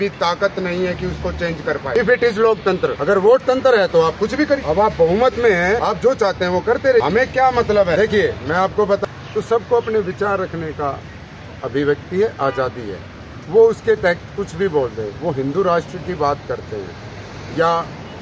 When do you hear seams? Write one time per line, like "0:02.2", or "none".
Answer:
0:01.9
0:03.0
0:04.6
0:05.8
0:07.0
0:08.0
0:09.0